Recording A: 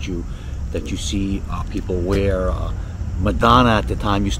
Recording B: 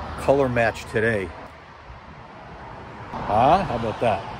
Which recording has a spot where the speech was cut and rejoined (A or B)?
B